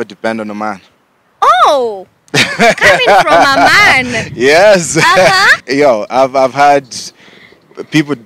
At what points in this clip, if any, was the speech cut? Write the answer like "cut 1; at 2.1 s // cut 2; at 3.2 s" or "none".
cut 1; at 5.5 s